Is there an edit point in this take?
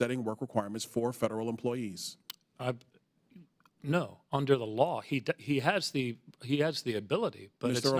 no; 0 cuts

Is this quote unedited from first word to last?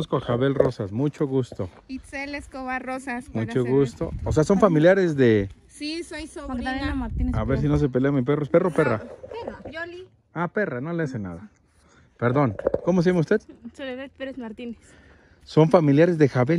yes; 0 cuts

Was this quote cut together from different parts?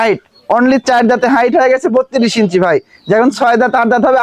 no; 0 cuts

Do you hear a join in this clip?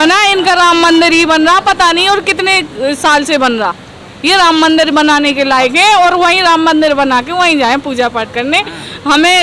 no; 0 cuts

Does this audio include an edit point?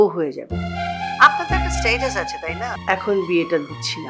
yes; 1 cut; at 2.7 s

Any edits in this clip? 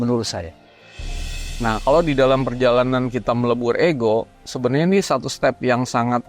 yes; 1 cut; at 1.1 s

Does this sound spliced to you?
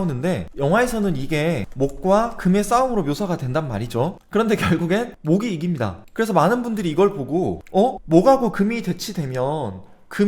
no; 0 cuts

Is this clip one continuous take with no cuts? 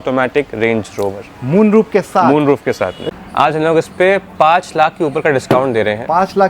no; 1 cut; at 3.1 s

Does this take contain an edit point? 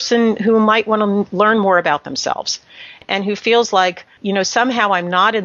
yes; 2 cuts; at 3.0 s, 4.1 s

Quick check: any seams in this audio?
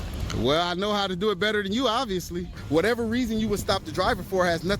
yes; 1 cut; at 2.5 s

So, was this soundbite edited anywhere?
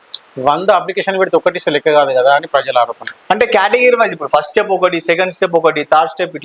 no; 0 cuts

